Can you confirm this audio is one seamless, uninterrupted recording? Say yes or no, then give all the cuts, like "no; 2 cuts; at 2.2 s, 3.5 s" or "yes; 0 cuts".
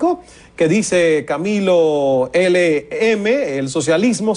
yes; 0 cuts